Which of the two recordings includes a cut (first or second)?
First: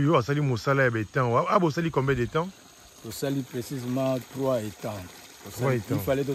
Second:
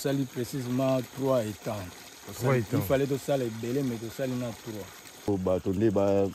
second